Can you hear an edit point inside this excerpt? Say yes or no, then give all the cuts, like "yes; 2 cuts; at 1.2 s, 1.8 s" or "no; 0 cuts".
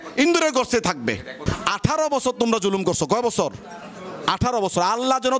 yes; 1 cut; at 1.4 s